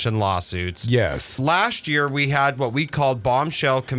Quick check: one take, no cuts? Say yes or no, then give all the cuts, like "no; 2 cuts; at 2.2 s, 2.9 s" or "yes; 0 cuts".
no; 1 cut; at 1.3 s